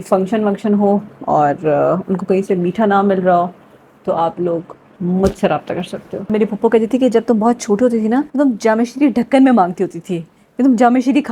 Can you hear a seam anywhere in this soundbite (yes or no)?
yes